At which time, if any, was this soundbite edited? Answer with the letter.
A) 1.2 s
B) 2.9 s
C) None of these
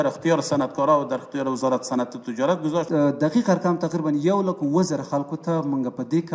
B